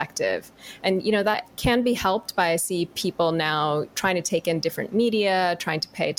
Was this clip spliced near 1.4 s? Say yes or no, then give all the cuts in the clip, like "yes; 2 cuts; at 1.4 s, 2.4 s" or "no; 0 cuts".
yes; 2 cuts; at 1.4 s, 3.9 s